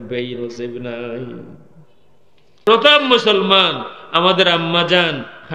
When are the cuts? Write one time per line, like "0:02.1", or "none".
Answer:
0:02.6

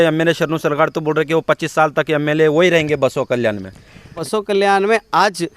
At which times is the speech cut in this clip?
0:04.2

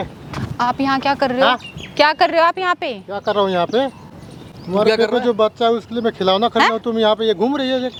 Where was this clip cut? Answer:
none

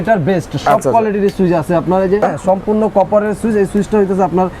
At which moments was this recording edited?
0:02.2

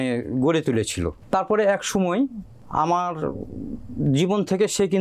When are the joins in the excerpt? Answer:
none

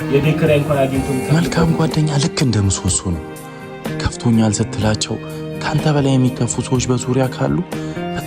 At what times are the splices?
0:01.2

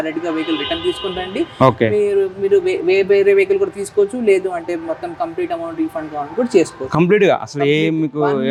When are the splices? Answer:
none

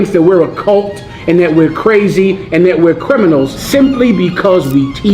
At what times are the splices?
0:03.6

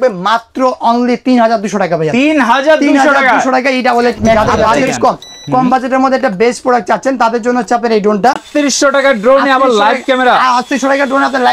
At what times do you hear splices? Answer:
0:04.4
0:08.4

